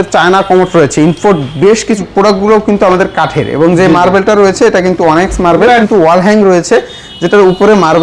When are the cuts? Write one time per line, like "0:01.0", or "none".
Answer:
0:02.1
0:05.8